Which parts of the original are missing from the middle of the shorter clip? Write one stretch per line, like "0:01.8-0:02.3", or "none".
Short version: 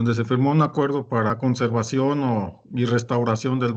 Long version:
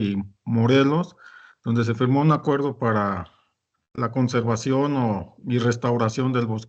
0:03.0-0:04.0